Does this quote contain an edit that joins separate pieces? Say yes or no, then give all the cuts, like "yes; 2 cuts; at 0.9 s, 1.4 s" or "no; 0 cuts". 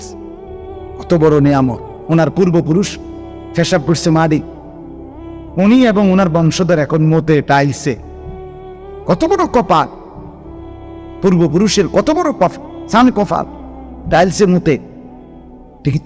yes; 2 cuts; at 9.9 s, 11.2 s